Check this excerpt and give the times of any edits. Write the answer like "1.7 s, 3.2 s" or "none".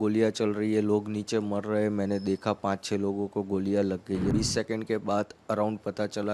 4.3 s

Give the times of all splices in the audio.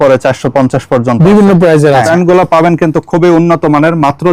2.1 s

